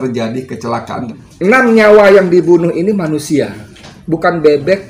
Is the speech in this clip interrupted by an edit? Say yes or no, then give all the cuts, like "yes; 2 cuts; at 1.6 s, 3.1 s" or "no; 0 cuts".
yes; 1 cut; at 1.0 s